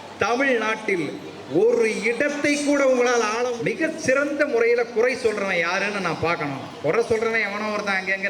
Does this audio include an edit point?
yes; 1 cut; at 3.5 s

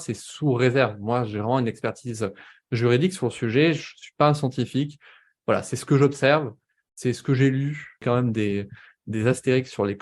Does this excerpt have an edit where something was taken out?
yes; 1 cut; at 8.0 s

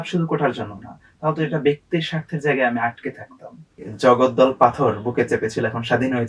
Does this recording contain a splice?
yes; 1 cut; at 3.8 s

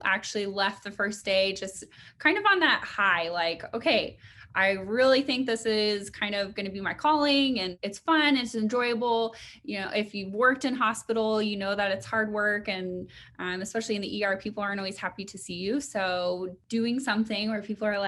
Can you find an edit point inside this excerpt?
yes; 2 cuts; at 7.7 s, 16.6 s

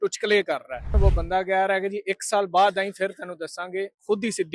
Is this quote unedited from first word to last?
no; 1 cut; at 0.9 s

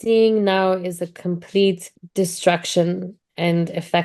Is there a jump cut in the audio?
yes; 1 cut; at 1.9 s

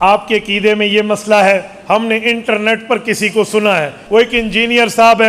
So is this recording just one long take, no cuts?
no; 1 cut; at 4.0 s

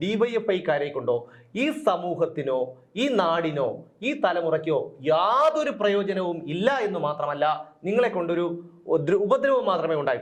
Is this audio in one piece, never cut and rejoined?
yes; 0 cuts

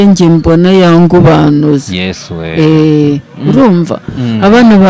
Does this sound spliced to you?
no; 0 cuts

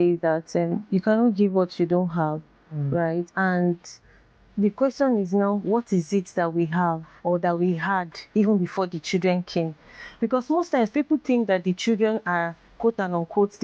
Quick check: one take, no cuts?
no; 1 cut; at 3.3 s

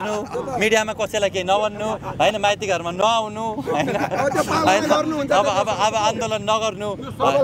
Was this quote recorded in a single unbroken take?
yes; 0 cuts

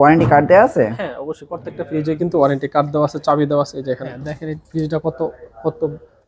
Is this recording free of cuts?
no; 1 cut; at 4.0 s

